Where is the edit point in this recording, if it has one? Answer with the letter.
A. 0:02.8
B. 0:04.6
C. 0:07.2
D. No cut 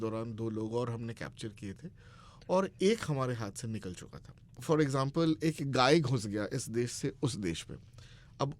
B